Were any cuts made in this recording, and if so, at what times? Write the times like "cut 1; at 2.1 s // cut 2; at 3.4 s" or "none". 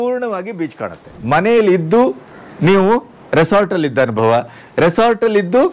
cut 1; at 1.2 s